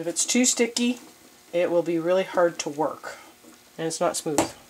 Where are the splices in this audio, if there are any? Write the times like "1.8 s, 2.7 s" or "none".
none